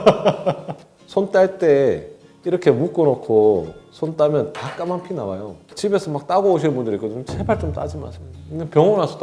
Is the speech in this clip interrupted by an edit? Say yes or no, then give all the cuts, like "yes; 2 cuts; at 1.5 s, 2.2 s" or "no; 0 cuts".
yes; 2 cuts; at 0.9 s, 5.7 s